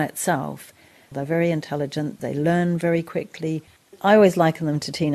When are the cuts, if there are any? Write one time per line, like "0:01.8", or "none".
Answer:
0:01.1
0:02.2
0:03.9